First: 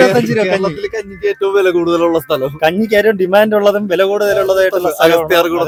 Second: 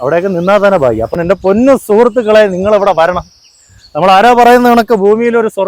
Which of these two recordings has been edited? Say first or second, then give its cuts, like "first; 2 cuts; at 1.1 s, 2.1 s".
second; 1 cut; at 1.1 s